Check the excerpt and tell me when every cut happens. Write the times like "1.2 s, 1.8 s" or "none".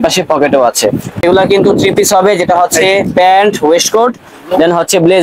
1.2 s